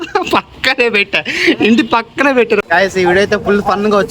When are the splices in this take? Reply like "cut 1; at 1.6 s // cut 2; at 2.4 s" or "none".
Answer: cut 1; at 2.6 s